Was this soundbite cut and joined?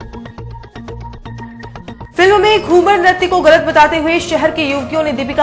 no; 0 cuts

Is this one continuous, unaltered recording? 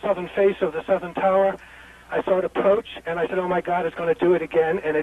no; 1 cut; at 2.7 s

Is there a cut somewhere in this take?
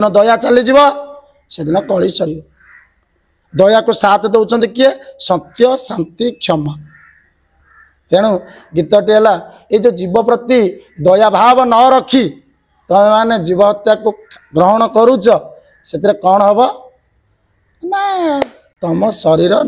no; 0 cuts

